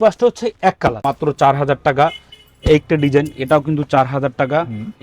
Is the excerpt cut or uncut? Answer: cut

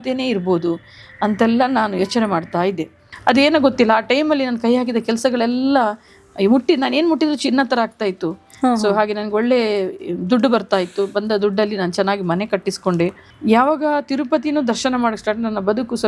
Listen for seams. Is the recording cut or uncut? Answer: cut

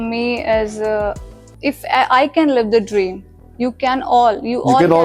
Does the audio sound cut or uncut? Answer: cut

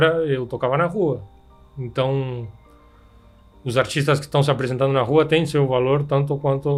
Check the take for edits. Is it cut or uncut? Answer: uncut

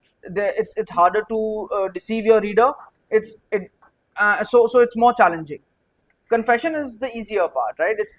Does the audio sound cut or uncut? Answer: uncut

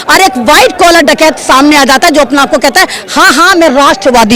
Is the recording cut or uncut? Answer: uncut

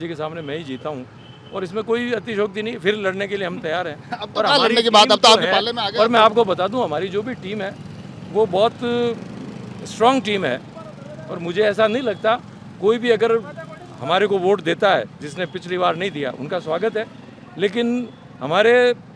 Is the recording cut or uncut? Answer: uncut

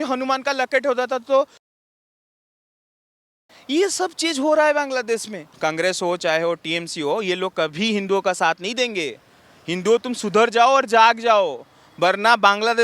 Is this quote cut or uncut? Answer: cut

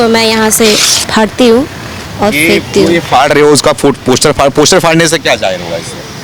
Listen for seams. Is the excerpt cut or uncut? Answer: uncut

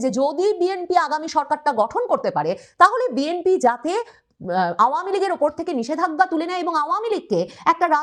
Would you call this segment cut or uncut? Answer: uncut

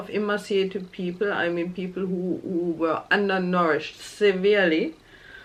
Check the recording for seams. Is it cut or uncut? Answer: uncut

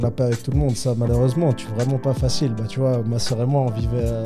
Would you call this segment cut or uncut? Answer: cut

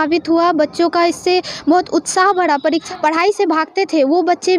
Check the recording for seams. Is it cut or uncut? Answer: cut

